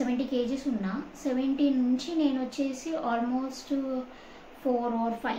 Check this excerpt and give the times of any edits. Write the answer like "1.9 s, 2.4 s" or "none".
none